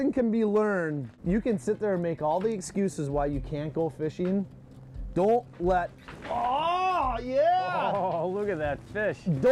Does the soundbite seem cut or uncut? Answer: cut